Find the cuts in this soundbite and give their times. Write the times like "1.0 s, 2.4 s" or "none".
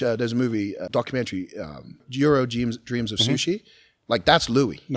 0.8 s, 2.1 s

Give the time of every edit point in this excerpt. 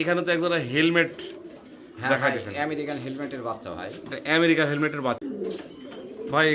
5.2 s

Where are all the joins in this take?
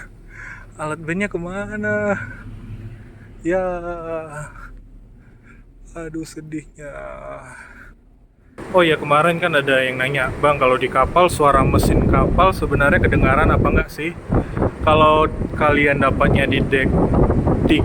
8.6 s

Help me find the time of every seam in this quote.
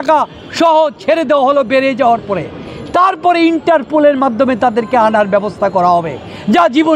none

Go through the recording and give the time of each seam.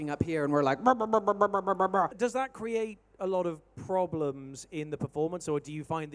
2.1 s

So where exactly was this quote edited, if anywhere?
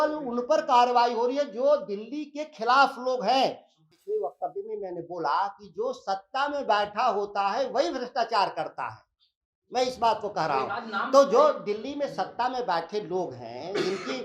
3.7 s

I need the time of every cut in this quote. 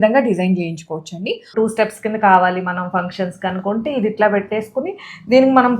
1.5 s

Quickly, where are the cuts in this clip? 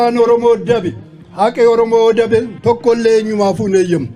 none

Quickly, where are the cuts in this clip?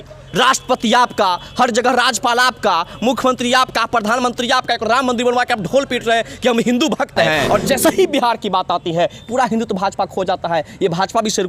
7.4 s

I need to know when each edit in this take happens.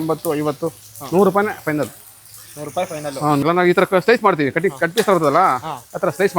3.4 s

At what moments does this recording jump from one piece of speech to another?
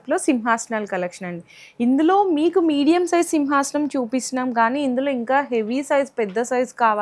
none

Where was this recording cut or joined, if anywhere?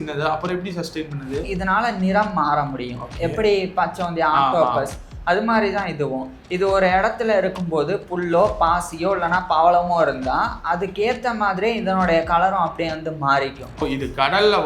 1.5 s, 13.8 s

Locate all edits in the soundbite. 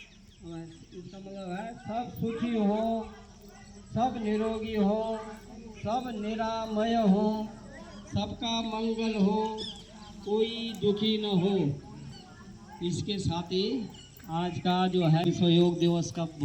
15.3 s

